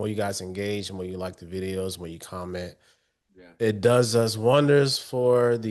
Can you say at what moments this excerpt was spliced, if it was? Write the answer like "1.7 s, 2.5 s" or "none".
none